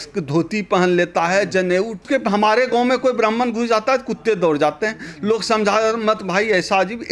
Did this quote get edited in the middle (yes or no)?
yes